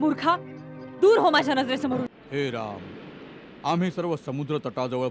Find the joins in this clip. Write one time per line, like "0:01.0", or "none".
0:02.2